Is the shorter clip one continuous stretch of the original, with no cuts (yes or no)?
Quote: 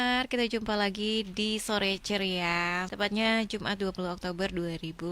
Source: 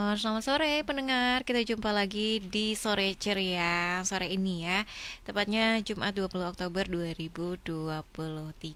no